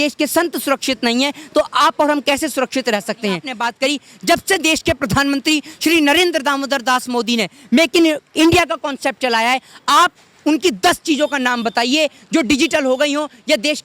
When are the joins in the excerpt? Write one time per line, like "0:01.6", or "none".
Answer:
0:03.5